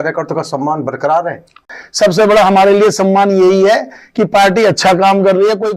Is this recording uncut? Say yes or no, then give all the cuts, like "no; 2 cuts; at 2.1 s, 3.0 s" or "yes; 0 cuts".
no; 1 cut; at 1.6 s